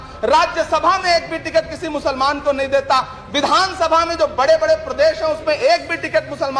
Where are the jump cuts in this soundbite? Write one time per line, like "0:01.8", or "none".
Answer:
none